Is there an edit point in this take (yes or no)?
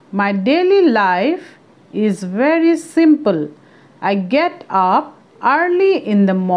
yes